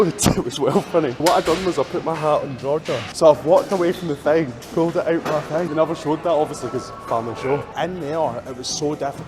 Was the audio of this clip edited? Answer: yes; 4 cuts; at 1.2 s, 3.1 s, 5.7 s, 7.7 s

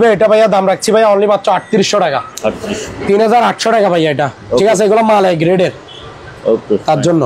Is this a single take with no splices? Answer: yes; 0 cuts

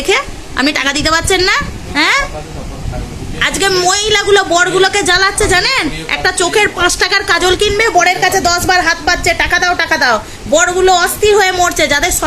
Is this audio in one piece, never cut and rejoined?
no; 1 cut; at 1.8 s

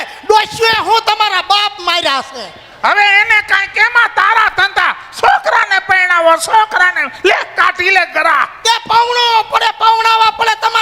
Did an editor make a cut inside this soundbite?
no; 0 cuts

